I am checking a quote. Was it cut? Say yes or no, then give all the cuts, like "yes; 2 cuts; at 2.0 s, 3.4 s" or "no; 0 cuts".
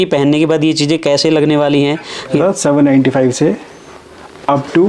yes; 1 cut; at 2.4 s